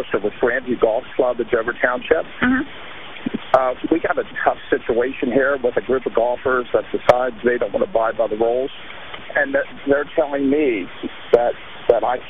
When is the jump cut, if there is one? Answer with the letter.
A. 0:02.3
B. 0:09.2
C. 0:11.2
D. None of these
B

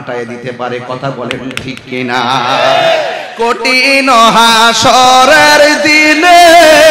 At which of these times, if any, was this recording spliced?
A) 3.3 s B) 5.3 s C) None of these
A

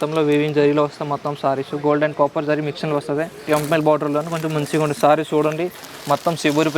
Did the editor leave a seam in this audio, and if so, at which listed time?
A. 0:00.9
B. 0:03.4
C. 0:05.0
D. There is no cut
B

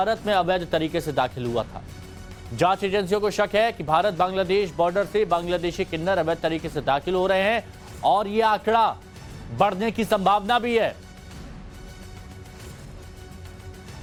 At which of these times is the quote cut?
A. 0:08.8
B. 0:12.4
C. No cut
C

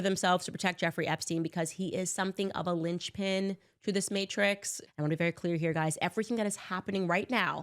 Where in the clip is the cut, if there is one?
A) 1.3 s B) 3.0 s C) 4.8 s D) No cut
C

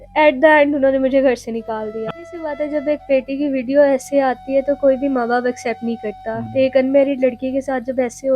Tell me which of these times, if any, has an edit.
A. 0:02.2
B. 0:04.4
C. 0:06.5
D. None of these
A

